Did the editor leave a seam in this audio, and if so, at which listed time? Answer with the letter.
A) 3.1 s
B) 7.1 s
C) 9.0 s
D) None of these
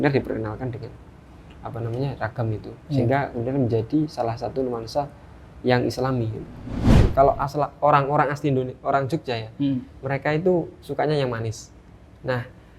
B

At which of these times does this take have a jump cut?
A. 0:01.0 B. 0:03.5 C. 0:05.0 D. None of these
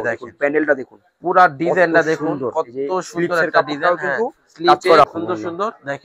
C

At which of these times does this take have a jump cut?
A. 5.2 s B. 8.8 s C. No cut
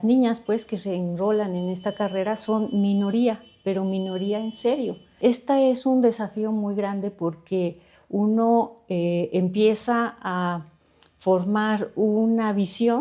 A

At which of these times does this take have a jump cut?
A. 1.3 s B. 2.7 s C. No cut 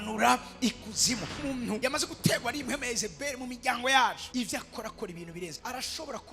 A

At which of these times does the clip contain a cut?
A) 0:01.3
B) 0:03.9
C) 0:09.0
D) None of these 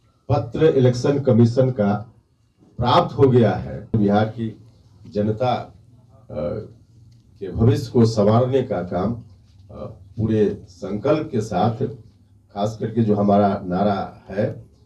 B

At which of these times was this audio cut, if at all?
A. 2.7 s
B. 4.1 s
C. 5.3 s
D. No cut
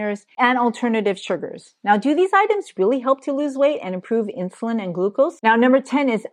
C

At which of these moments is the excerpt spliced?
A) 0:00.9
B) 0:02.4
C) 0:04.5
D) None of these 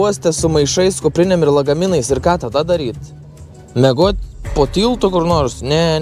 D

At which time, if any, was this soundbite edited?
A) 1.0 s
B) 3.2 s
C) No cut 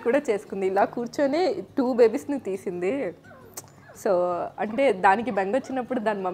C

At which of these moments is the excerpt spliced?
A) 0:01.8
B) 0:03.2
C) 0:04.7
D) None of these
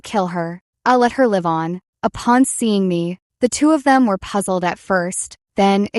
A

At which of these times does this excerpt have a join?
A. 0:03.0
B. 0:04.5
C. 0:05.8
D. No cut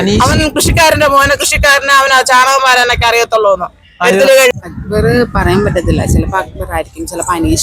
B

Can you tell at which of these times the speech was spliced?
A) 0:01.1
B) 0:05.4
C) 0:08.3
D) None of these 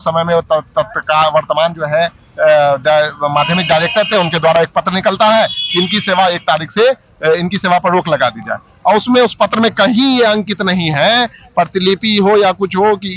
D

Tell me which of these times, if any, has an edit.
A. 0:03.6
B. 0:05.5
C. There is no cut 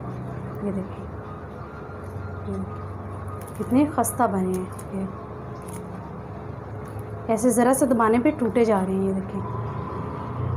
C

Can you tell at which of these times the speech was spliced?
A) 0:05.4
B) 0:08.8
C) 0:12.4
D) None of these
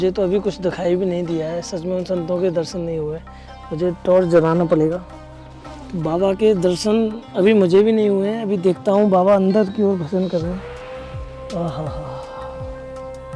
D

